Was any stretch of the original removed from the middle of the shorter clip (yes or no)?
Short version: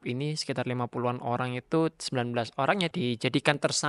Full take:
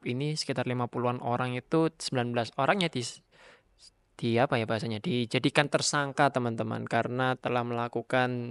yes